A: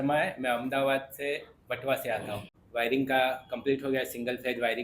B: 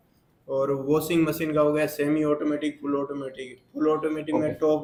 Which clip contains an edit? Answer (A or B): A